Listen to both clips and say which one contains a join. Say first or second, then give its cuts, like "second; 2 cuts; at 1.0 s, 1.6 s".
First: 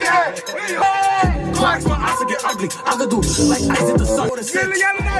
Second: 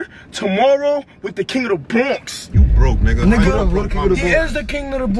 first; 1 cut; at 4.3 s